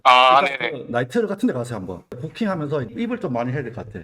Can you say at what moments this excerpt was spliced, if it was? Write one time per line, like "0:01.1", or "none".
0:02.1